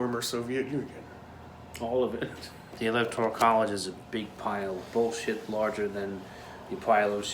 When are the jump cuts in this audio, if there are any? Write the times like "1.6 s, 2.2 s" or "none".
2.7 s